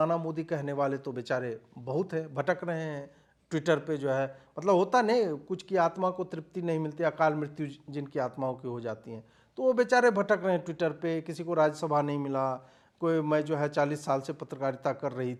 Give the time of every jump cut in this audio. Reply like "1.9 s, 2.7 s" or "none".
none